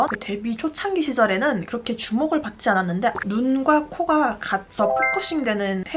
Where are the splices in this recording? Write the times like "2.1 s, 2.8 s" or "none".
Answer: 3.2 s